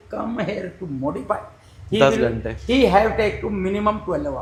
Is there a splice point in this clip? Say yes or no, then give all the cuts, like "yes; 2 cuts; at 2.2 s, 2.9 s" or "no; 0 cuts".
no; 0 cuts